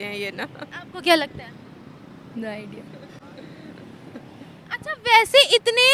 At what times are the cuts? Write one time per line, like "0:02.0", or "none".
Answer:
none